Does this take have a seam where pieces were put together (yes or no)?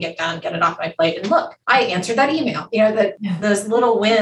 yes